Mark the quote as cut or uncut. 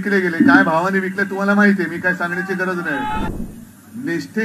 cut